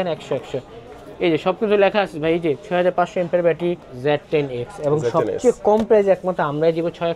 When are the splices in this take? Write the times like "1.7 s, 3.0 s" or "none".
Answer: 3.9 s